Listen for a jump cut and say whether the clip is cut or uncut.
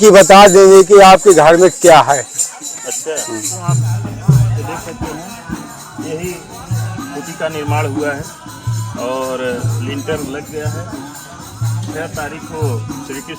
cut